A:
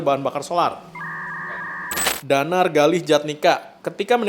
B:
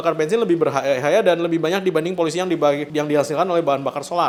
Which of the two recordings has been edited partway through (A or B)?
A